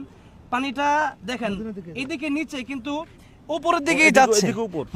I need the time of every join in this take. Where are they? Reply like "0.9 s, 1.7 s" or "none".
none